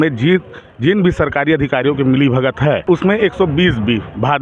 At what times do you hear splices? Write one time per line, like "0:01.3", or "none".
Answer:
0:02.8